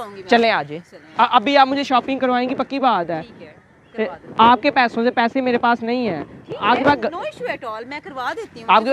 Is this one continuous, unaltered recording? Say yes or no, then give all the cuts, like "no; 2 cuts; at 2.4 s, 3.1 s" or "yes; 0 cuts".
yes; 0 cuts